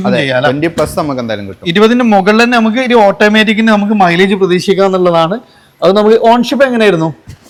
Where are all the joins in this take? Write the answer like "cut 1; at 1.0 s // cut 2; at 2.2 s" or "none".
none